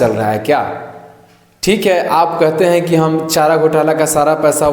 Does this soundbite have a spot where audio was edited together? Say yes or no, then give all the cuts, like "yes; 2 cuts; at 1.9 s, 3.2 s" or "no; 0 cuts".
no; 0 cuts